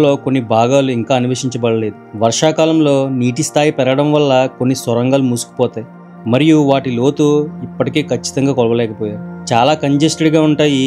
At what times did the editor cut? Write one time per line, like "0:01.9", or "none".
none